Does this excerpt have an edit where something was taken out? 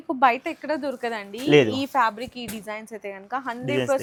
no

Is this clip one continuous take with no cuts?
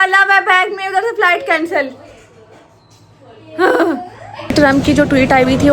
no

